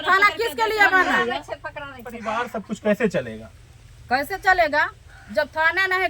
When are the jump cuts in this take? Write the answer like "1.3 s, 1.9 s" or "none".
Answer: 2.3 s